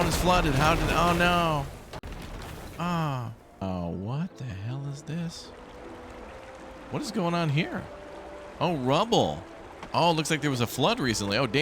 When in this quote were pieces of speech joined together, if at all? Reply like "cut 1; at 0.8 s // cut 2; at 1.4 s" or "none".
cut 1; at 3.6 s